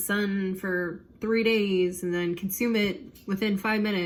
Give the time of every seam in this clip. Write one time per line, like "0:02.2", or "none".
none